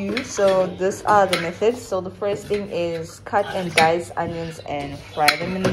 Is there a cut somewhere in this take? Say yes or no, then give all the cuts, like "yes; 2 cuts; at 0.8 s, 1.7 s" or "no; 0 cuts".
no; 0 cuts